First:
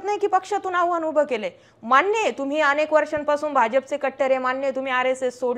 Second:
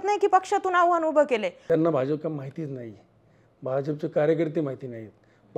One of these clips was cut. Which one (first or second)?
second